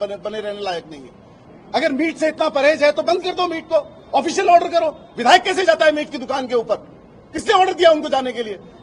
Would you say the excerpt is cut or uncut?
cut